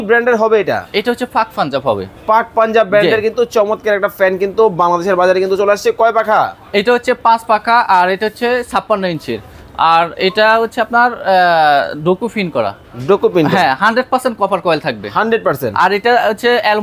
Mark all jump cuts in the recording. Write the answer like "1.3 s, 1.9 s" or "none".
none